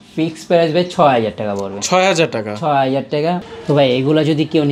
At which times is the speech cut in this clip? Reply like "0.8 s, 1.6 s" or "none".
3.4 s

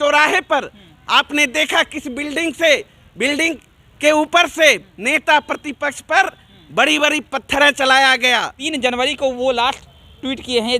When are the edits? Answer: 8.6 s

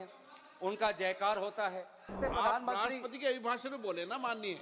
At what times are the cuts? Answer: 2.2 s

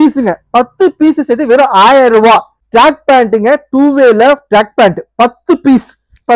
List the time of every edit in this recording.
2.6 s

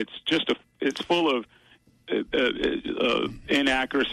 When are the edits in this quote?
none

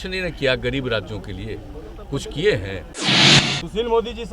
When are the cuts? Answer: 3.1 s

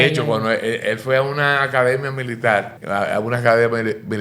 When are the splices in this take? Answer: 2.8 s

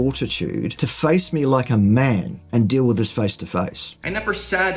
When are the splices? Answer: 3.9 s

